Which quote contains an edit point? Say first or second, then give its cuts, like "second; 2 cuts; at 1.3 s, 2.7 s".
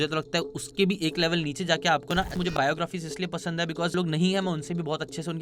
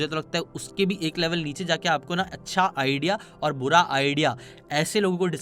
first; 2 cuts; at 2.5 s, 3.9 s